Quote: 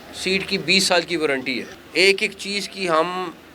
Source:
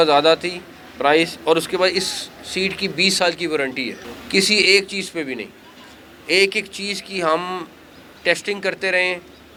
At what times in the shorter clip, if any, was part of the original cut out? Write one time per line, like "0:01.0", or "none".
0:01.7